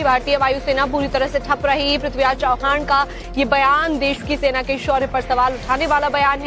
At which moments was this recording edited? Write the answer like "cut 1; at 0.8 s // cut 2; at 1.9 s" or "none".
none